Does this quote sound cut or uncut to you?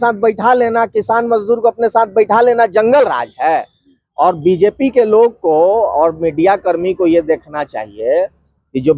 uncut